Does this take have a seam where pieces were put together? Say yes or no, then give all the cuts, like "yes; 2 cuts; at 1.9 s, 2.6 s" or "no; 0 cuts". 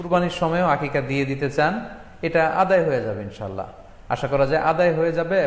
no; 0 cuts